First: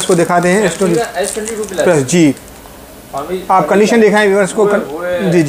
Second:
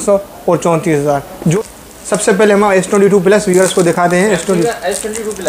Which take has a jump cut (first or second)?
second